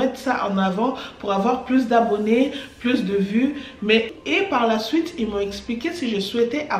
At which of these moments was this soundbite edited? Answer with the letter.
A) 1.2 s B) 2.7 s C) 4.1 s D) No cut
C